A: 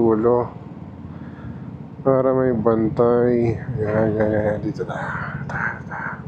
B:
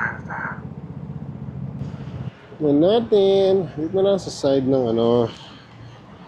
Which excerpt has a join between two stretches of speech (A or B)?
B